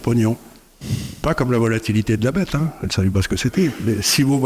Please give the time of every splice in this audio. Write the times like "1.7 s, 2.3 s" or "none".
none